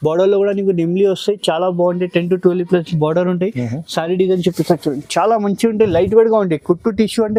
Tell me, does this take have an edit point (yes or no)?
no